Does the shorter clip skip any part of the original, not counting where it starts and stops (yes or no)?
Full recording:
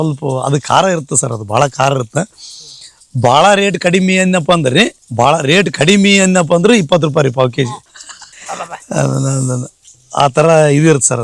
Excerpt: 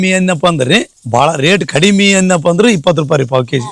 no